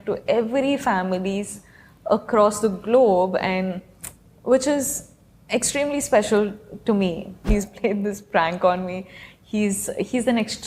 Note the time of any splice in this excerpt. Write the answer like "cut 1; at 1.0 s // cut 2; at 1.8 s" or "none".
cut 1; at 7.5 s

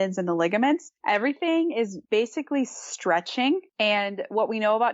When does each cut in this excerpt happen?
cut 1; at 0.9 s // cut 2; at 2.0 s // cut 3; at 3.7 s

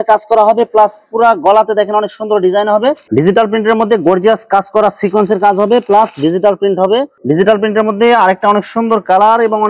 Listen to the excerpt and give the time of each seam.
cut 1; at 3.0 s // cut 2; at 7.2 s

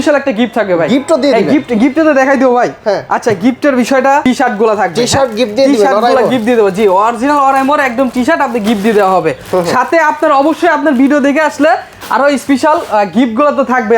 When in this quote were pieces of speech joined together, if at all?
none

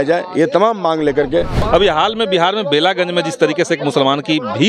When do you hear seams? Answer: cut 1; at 1.6 s

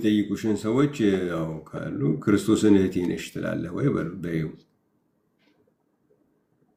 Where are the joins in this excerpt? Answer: none

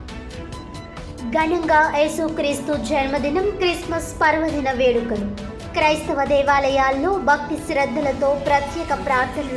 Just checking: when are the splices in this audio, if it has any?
cut 1; at 1.1 s

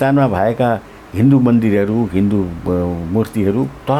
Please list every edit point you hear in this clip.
none

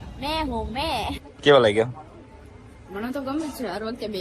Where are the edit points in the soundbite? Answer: cut 1; at 1.3 s

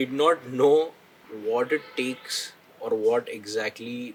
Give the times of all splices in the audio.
none

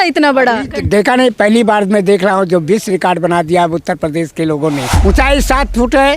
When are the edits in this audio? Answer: cut 1; at 4.9 s

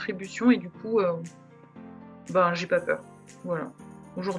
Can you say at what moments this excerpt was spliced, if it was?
none

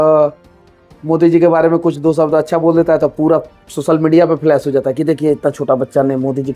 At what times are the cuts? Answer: none

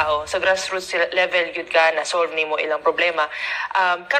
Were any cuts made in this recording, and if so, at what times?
none

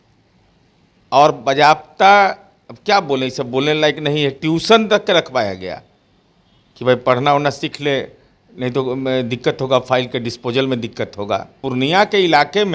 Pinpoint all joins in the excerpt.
cut 1; at 11.6 s

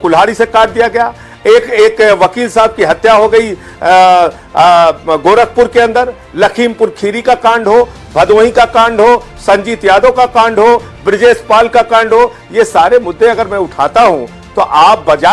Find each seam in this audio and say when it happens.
none

